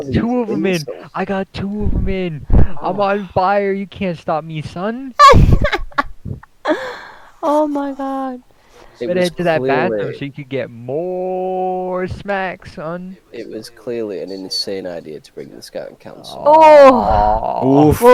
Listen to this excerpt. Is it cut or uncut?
uncut